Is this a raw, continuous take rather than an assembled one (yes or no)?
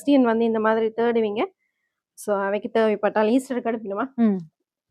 yes